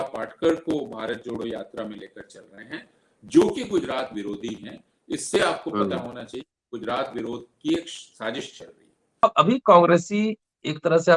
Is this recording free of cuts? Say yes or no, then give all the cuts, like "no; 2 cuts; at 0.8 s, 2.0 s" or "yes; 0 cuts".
no; 1 cut; at 9.2 s